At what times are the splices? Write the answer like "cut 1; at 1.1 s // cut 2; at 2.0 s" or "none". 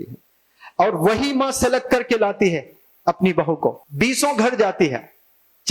cut 1; at 3.8 s